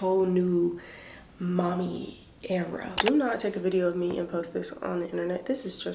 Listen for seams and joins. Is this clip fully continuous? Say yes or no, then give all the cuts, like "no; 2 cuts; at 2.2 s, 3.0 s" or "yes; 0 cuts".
no; 1 cut; at 3.0 s